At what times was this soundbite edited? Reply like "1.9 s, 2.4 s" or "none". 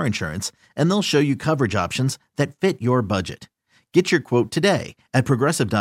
none